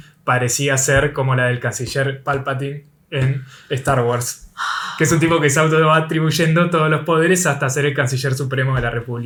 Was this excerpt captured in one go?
yes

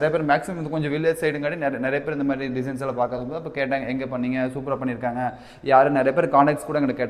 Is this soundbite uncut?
yes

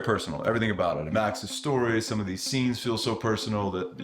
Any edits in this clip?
yes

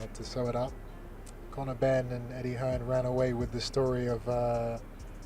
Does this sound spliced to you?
yes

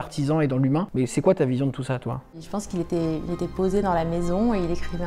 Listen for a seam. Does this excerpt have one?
yes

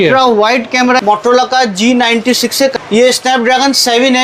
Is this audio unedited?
no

